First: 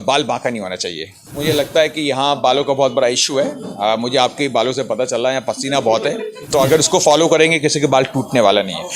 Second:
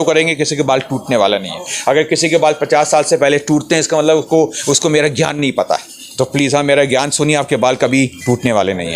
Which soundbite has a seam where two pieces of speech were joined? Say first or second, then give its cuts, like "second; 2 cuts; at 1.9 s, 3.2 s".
first; 2 cuts; at 1.3 s, 6.3 s